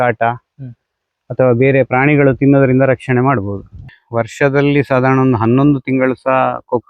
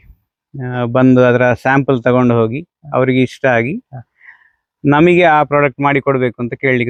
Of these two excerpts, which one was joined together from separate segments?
first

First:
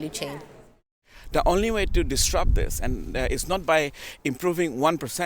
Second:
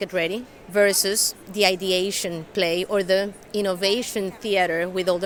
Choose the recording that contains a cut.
first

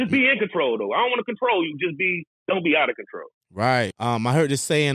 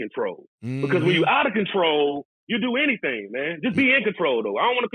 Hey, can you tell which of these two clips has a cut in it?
first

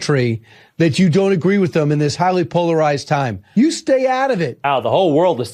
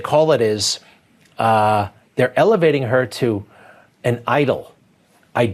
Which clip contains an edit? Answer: first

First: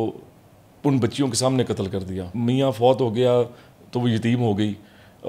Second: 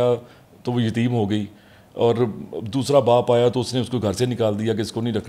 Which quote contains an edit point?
first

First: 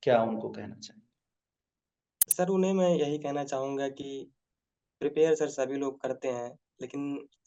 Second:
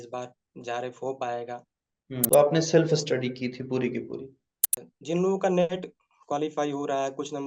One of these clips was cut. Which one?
second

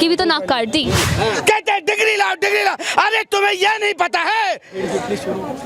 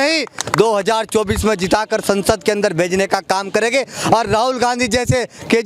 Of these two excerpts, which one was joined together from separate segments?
first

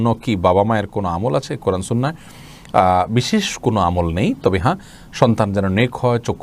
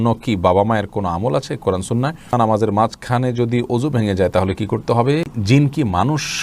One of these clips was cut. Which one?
second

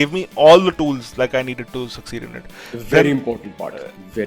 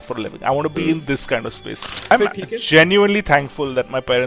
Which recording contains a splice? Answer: second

